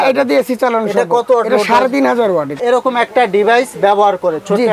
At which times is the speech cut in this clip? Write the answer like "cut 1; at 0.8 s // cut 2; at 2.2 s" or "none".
cut 1; at 2.6 s

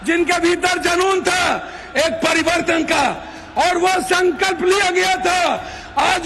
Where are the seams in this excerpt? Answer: none

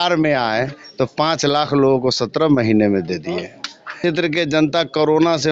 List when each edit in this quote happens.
cut 1; at 4.0 s

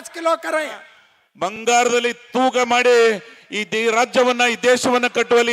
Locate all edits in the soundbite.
cut 1; at 1.6 s

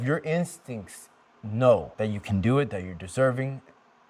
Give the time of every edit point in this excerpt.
cut 1; at 1.9 s

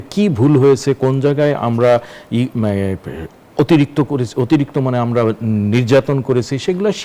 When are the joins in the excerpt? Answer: none

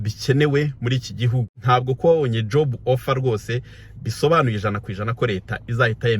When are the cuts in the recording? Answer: cut 1; at 1.5 s

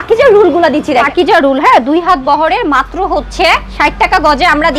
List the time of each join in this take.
cut 1; at 1.1 s

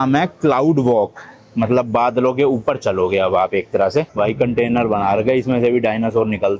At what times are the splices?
cut 1; at 4.1 s

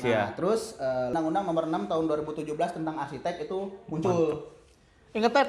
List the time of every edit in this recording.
cut 1; at 1.1 s

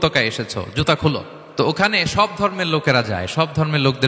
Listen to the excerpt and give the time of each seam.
cut 1; at 1.4 s

